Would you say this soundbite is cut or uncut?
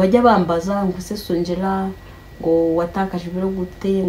uncut